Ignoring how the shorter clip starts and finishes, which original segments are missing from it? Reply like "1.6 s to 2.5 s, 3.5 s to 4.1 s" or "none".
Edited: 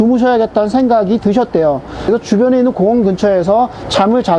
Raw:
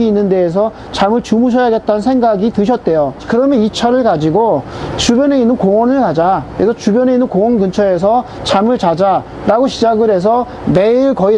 3.2 s to 6.5 s